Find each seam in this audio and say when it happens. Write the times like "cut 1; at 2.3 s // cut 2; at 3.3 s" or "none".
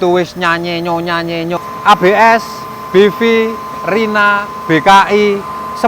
cut 1; at 1.6 s